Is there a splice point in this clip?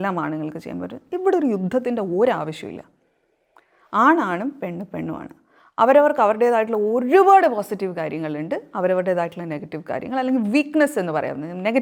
no; 0 cuts

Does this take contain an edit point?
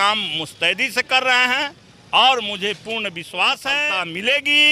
yes; 1 cut; at 3.8 s

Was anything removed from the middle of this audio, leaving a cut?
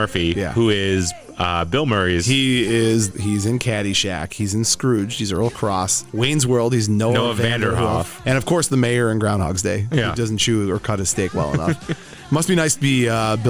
yes; 2 cuts; at 3.1 s, 8.2 s

